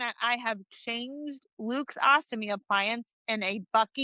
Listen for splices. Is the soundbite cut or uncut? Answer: uncut